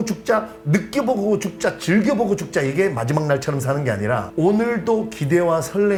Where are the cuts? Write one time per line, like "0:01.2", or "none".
none